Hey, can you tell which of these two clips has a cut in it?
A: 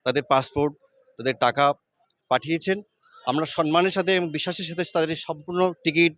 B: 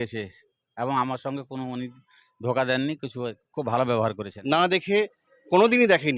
B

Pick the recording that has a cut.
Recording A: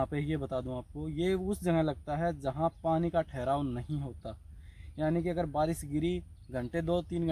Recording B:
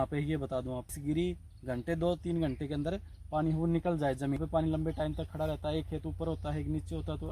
B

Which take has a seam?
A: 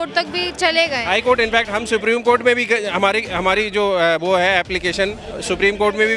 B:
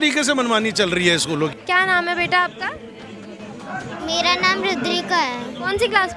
B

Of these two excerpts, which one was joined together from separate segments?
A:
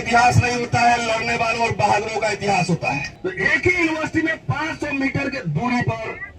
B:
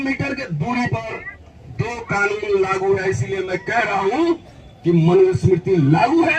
A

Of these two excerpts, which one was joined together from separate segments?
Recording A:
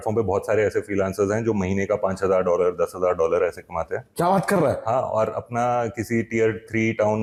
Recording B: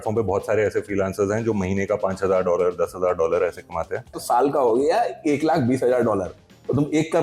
B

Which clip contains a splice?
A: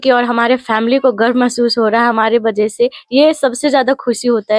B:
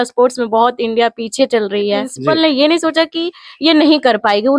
B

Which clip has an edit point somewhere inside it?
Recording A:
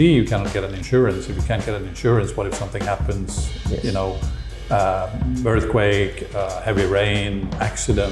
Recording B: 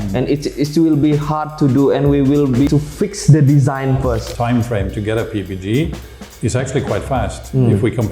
B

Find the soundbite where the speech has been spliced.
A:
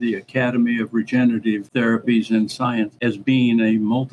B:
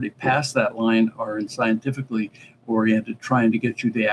A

